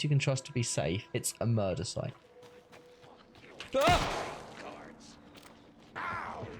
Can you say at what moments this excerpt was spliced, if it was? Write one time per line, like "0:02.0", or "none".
0:02.2

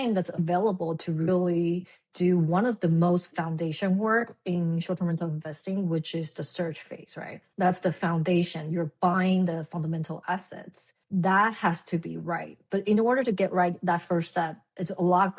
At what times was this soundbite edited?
none

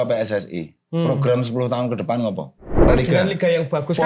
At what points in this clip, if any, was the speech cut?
0:02.9

